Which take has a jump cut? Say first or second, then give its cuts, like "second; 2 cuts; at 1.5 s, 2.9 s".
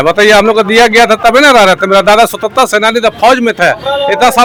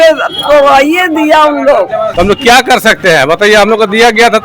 second; 1 cut; at 2.1 s